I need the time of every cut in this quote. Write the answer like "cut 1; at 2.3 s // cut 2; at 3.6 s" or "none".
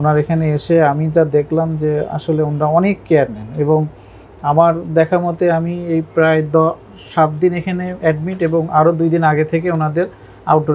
none